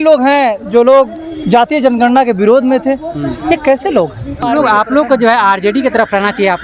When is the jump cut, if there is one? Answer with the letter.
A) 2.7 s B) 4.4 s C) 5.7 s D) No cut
B